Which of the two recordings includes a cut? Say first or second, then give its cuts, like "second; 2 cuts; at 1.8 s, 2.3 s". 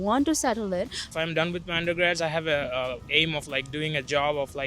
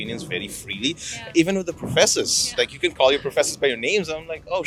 first; 1 cut; at 1.0 s